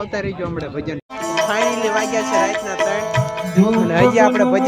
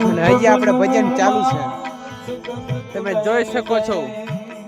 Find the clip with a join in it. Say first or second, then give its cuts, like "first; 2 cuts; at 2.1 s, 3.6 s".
first; 1 cut; at 1.0 s